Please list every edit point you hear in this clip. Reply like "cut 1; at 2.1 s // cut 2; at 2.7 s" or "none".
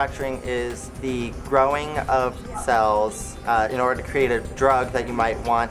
cut 1; at 1.4 s // cut 2; at 3.3 s